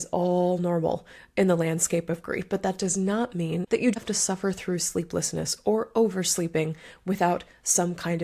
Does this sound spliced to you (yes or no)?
yes